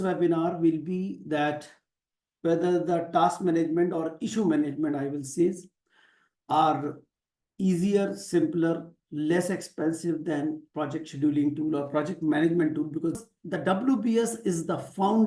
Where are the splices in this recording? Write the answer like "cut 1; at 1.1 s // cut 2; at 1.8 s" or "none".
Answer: cut 1; at 13.2 s